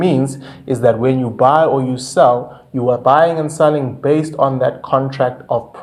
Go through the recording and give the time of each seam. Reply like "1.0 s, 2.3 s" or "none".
none

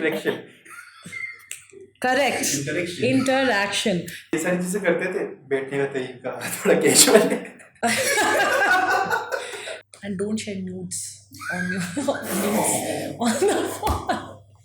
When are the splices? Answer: 4.2 s, 9.7 s

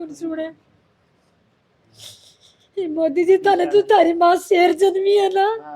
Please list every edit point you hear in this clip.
none

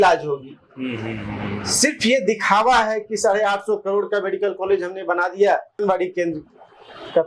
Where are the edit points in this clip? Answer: 5.8 s

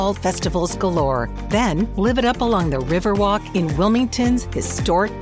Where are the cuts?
none

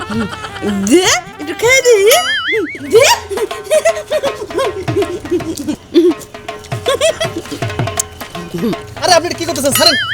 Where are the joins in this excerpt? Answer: 5.8 s

